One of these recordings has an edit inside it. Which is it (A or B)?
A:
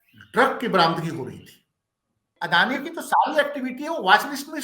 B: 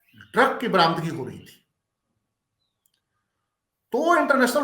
A